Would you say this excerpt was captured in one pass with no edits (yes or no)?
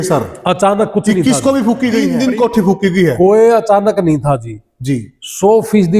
yes